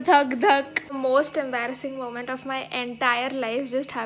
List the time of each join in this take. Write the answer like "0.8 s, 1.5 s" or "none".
1.0 s